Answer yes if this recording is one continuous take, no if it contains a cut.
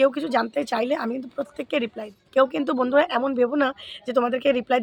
yes